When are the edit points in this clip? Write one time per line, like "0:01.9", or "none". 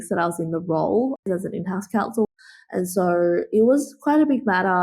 0:01.3
0:02.2